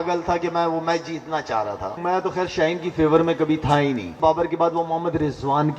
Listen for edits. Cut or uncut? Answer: cut